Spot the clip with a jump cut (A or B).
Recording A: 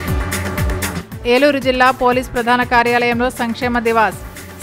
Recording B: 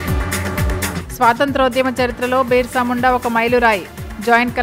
A